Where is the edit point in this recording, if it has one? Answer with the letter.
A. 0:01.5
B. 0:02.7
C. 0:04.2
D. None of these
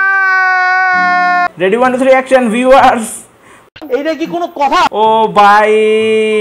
A